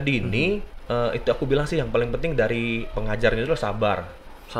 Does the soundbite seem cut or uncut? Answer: uncut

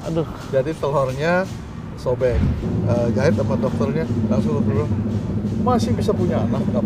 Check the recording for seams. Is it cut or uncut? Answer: cut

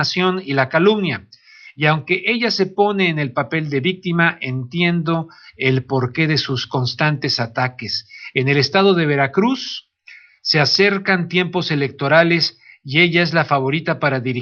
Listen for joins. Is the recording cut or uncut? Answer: uncut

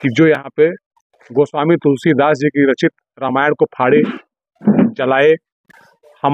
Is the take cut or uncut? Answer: uncut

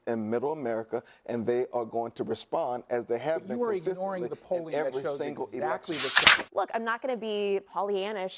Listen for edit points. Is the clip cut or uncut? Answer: cut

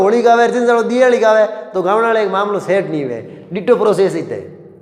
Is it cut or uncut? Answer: uncut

